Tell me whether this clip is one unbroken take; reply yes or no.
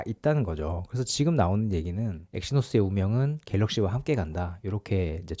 no